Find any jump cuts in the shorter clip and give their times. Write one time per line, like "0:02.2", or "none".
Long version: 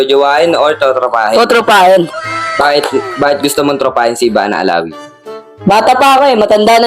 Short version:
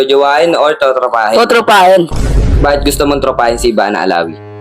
0:02.5